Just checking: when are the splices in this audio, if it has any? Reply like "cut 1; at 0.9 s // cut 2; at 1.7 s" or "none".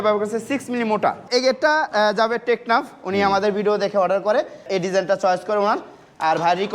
cut 1; at 1.2 s // cut 2; at 4.7 s

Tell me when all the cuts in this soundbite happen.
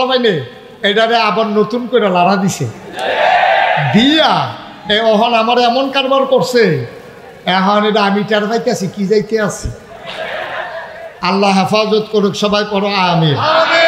none

